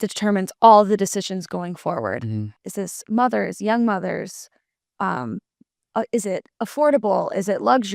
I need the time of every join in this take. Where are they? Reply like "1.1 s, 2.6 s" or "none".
2.5 s